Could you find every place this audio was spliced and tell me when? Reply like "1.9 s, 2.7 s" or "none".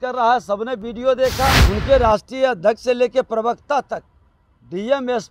1.6 s